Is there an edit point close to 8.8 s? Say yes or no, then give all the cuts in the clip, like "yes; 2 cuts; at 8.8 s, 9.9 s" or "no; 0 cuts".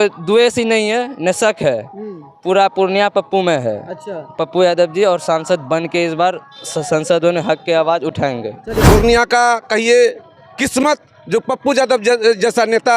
yes; 1 cut; at 8.8 s